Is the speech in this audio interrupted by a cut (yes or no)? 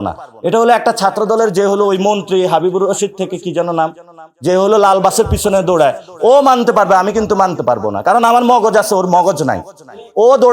no